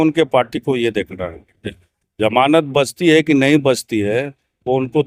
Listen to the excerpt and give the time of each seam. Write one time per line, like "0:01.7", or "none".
none